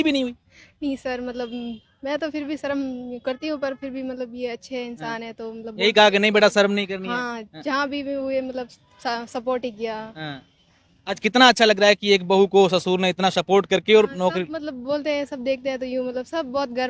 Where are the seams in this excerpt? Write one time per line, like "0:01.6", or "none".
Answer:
none